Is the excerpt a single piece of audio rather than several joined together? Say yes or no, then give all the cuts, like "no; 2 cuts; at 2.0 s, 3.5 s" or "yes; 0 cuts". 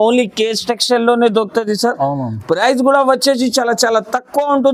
yes; 0 cuts